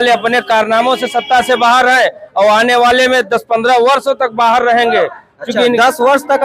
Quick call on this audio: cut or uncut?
uncut